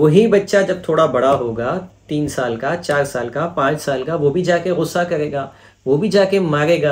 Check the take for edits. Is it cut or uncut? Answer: uncut